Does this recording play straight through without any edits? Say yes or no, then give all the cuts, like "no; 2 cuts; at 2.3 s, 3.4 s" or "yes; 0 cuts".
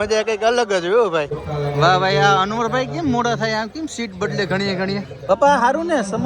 no; 2 cuts; at 1.4 s, 5.1 s